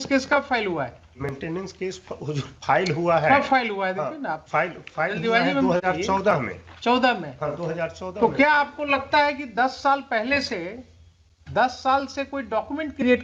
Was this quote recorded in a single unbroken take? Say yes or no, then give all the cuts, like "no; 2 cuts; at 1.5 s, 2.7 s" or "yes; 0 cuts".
yes; 0 cuts